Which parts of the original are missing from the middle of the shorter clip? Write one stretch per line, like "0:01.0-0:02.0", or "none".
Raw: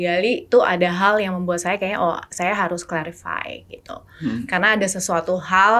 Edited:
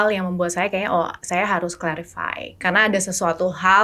0:03.7-0:04.5

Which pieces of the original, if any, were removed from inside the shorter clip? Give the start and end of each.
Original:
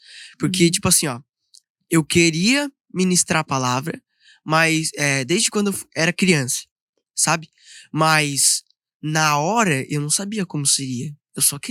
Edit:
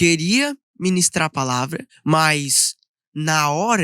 0:04.0-0:07.7

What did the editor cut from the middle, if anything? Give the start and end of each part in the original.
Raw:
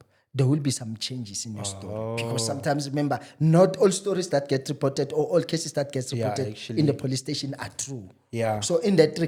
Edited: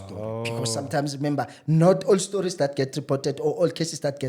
none

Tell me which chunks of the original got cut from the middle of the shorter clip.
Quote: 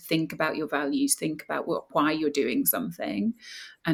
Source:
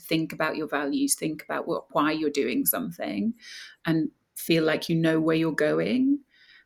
none

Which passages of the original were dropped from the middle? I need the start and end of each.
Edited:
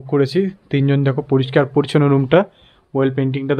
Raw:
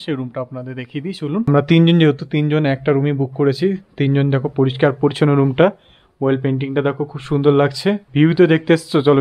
none

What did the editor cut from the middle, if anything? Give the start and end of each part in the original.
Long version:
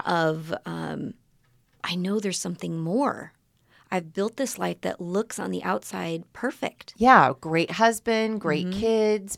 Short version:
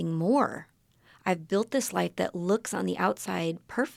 none

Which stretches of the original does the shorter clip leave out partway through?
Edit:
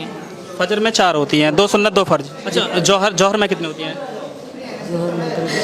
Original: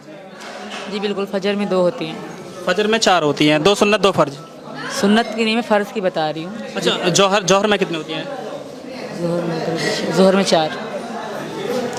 0:04.4-0:06.7

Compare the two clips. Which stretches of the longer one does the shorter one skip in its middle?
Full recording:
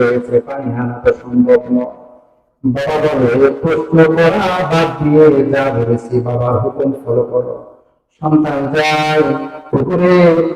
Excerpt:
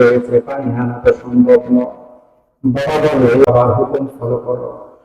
0:03.4-0:06.3

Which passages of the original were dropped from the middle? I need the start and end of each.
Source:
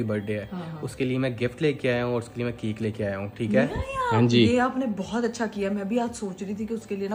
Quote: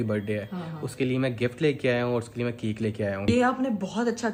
0:03.3-0:04.4

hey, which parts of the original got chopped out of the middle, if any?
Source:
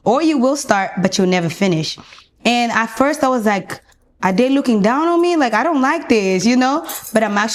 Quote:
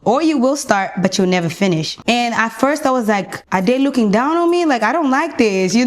0:01.9-0:02.3
0:03.7-0:04.1

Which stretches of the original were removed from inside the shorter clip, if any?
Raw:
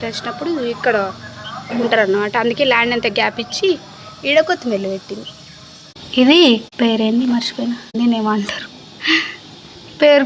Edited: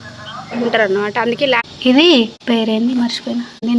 0:02.8-0:05.9

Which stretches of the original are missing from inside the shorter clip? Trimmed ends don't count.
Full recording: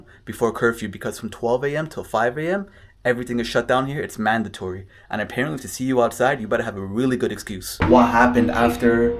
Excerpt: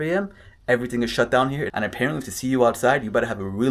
0:04.0-0:05.0

